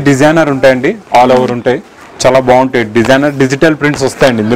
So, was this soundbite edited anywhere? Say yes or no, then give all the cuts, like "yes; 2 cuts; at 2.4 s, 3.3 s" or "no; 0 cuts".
no; 0 cuts